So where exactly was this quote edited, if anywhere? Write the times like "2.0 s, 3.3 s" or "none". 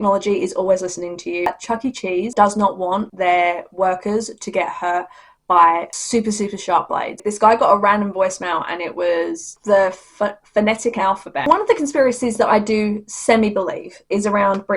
1.5 s, 7.3 s, 11.5 s